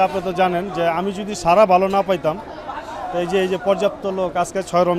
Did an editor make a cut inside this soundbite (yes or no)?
no